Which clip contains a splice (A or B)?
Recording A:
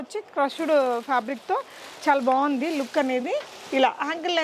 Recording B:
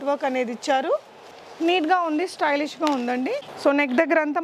B